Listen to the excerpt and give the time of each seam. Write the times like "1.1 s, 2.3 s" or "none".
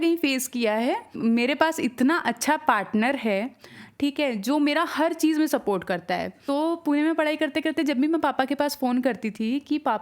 1.1 s, 6.3 s